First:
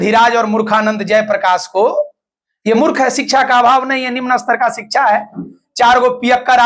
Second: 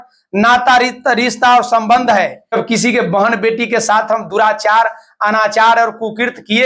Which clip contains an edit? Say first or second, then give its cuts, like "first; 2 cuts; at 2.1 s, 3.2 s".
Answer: second; 1 cut; at 2.5 s